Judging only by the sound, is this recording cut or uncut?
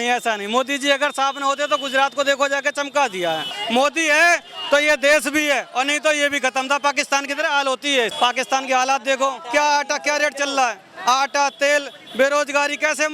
cut